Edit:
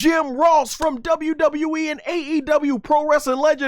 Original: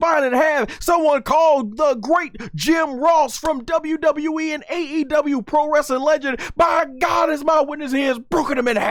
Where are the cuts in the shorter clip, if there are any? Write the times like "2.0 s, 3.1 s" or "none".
none